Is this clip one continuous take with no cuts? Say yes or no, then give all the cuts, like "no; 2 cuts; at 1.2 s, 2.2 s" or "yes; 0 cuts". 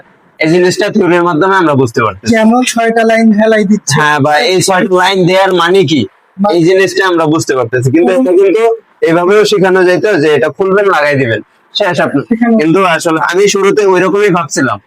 yes; 0 cuts